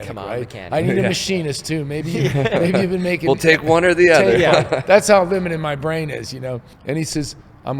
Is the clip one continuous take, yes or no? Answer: no